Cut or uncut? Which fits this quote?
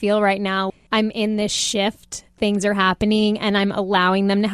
cut